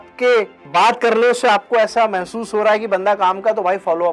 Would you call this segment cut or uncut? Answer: uncut